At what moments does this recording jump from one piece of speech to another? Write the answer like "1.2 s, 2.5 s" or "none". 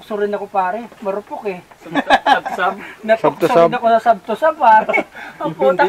none